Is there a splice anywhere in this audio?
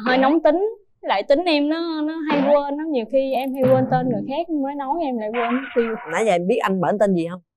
no; 0 cuts

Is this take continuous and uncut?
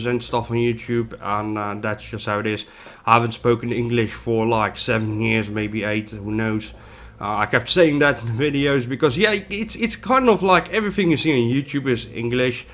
yes; 0 cuts

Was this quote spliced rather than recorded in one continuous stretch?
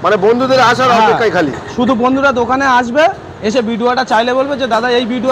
no; 0 cuts

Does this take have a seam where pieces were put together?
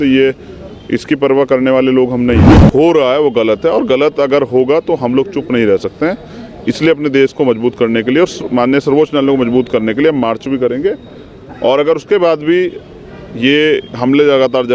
yes; 1 cut; at 2.6 s

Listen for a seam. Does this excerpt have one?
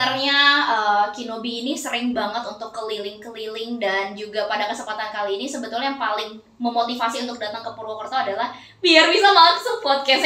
no; 0 cuts

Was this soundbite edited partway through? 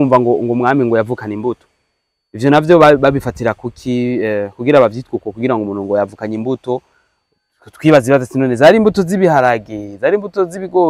no; 0 cuts

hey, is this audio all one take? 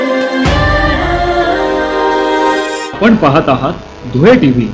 yes; 0 cuts

